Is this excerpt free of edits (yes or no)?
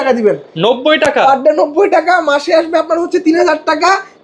yes